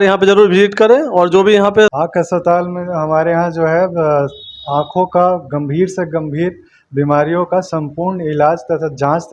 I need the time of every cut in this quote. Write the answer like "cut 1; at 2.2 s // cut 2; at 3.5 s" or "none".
cut 1; at 2.0 s